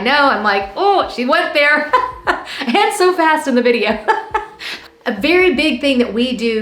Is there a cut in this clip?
yes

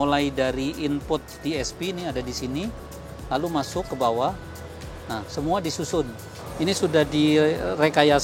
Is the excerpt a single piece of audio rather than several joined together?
no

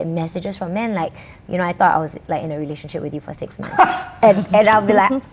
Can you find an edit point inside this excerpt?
no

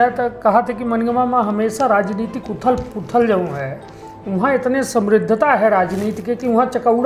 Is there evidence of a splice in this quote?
no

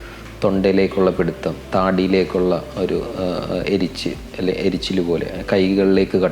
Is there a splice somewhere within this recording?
no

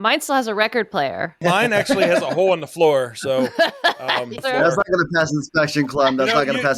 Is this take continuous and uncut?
no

